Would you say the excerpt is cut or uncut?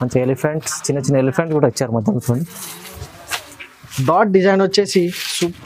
cut